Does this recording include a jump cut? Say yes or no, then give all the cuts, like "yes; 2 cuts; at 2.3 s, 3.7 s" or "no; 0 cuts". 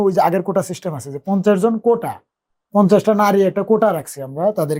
no; 0 cuts